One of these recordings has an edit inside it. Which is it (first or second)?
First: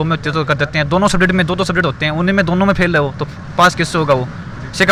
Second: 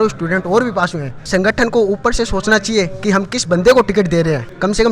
second